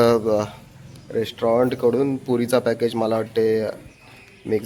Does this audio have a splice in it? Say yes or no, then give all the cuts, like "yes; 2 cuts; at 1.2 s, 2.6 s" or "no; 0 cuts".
no; 0 cuts